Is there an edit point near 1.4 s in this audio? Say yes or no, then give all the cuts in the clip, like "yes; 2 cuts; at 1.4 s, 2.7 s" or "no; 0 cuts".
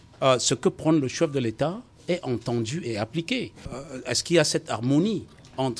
no; 1 cut; at 3.7 s